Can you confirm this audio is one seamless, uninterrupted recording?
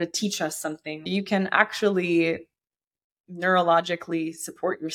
no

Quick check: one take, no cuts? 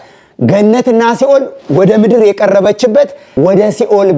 no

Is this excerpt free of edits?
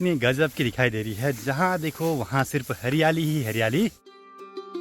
yes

